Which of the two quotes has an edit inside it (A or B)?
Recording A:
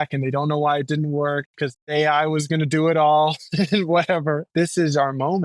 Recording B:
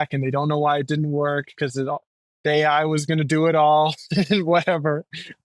A